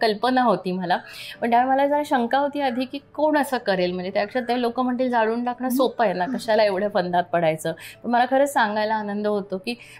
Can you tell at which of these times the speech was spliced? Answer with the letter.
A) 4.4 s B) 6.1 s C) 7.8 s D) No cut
D